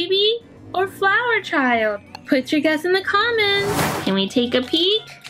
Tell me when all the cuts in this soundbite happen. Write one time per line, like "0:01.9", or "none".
0:03.9